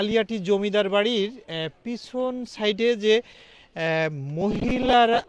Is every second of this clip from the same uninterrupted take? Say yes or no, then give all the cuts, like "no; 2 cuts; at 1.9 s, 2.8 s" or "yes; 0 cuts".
yes; 0 cuts